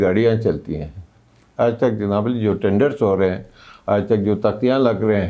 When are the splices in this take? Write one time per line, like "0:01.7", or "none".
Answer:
0:01.4